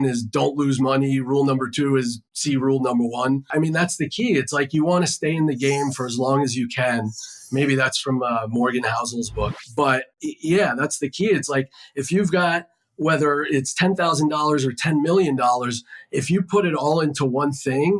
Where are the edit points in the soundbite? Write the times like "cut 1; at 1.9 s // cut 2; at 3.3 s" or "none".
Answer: cut 1; at 3.5 s